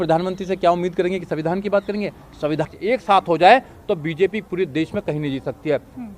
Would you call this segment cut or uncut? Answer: cut